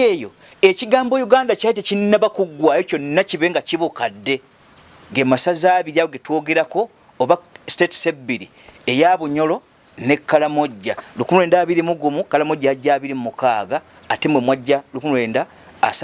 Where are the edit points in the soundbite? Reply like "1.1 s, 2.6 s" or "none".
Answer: none